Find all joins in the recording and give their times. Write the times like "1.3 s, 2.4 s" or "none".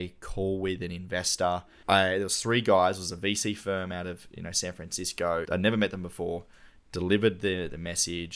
1.7 s, 5.5 s